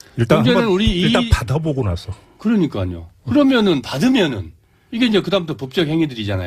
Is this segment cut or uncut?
cut